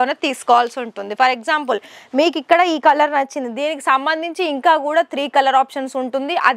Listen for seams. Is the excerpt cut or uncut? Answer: uncut